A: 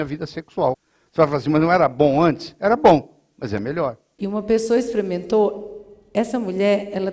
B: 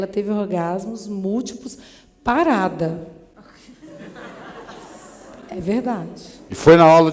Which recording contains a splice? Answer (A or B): A